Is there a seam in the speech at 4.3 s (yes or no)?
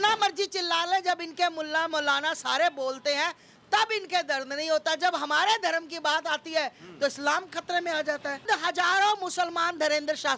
no